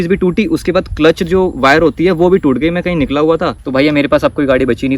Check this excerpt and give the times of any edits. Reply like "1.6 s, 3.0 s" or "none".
3.6 s